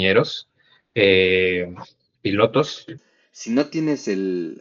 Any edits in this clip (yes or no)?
yes